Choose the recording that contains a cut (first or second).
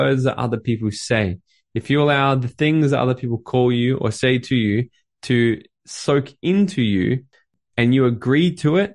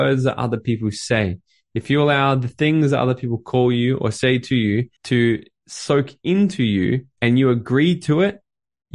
second